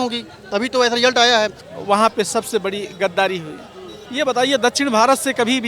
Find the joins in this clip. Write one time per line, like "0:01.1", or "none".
0:01.7